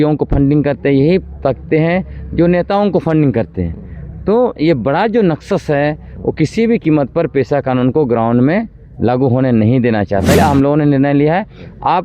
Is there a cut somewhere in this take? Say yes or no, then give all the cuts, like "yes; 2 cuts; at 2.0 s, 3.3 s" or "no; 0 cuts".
yes; 1 cut; at 10.3 s